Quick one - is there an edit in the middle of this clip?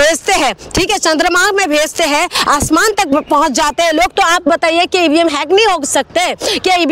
no; 0 cuts

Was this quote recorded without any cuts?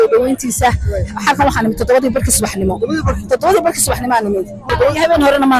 no; 1 cut; at 4.6 s

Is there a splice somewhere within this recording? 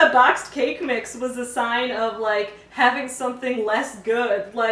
no; 0 cuts

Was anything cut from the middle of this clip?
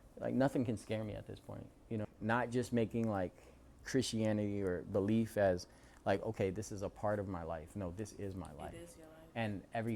yes; 1 cut; at 2.1 s

